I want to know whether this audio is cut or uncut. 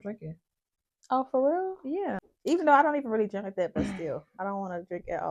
cut